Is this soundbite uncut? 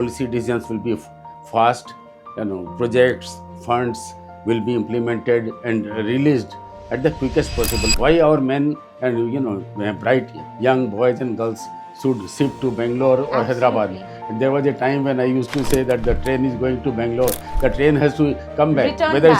no; 1 cut; at 7.9 s

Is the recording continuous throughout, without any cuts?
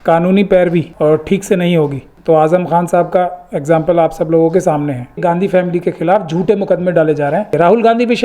no; 4 cuts; at 0.9 s, 2.1 s, 5.2 s, 7.5 s

